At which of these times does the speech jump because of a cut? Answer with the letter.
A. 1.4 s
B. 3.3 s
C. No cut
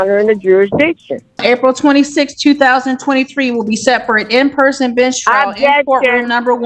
A